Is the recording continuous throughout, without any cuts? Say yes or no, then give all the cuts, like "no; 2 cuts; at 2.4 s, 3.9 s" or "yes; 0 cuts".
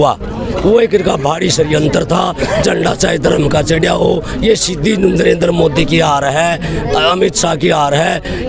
yes; 0 cuts